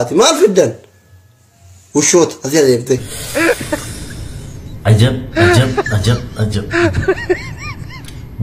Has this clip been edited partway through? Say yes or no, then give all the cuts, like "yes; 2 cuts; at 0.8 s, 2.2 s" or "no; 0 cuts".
yes; 1 cut; at 3.2 s